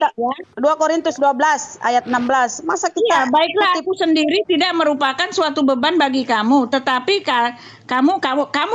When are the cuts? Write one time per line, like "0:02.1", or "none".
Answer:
none